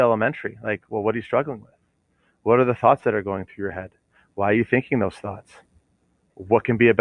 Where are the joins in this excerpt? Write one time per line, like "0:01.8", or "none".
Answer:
none